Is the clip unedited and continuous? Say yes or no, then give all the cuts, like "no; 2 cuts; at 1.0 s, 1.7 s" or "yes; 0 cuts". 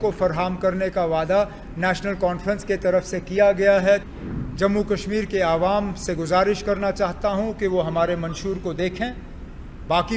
no; 1 cut; at 4.0 s